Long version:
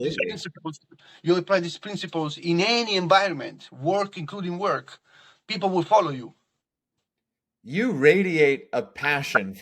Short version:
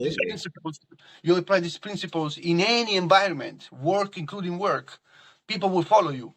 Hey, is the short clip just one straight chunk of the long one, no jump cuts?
yes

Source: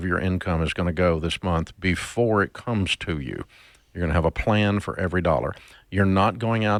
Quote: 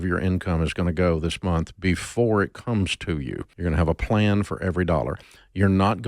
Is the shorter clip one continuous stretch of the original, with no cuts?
no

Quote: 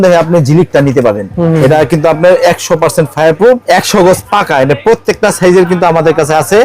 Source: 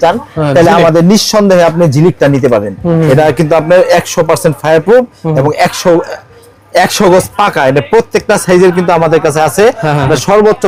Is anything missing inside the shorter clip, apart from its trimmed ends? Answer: yes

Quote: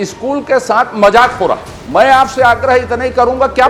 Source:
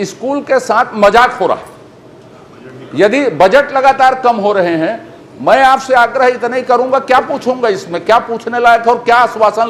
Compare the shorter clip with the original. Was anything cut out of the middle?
yes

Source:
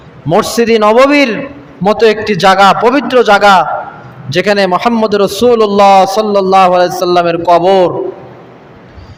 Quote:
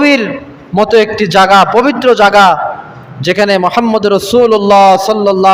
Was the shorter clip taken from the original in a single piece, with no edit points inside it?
yes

